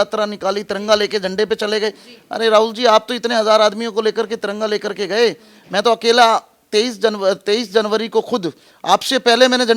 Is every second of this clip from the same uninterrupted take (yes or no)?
yes